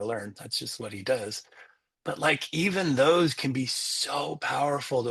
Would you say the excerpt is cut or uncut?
uncut